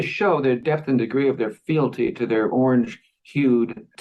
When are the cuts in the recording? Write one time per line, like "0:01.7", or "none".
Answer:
none